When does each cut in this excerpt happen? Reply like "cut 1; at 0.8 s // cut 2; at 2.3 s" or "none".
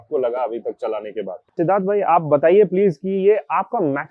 cut 1; at 1.5 s

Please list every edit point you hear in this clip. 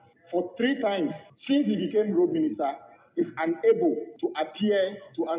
cut 1; at 1.3 s // cut 2; at 4.1 s

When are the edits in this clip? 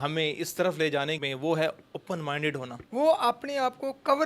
cut 1; at 1.3 s // cut 2; at 2.7 s

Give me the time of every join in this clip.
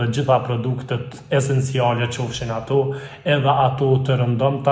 none

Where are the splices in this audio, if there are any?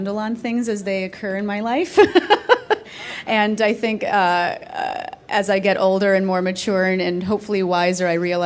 cut 1; at 3.6 s

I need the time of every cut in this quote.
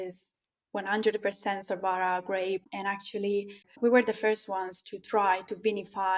cut 1; at 2.7 s // cut 2; at 3.7 s

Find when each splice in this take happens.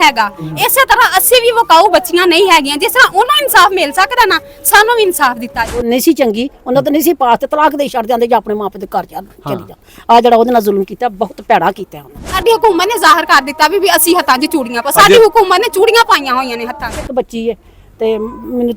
cut 1; at 5.8 s // cut 2; at 12.4 s // cut 3; at 17.1 s

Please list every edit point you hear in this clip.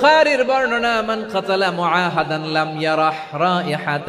none

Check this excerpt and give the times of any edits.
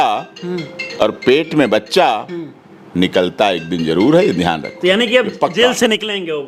none

